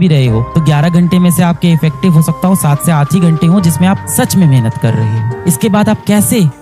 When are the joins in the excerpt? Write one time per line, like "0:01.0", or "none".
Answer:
none